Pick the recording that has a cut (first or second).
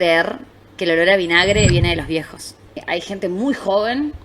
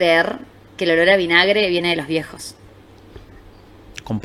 first